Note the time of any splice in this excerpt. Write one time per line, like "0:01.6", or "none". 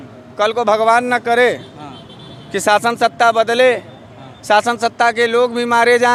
none